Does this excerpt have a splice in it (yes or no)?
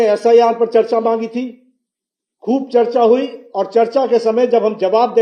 no